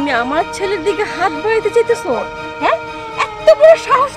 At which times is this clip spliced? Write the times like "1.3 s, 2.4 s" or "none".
none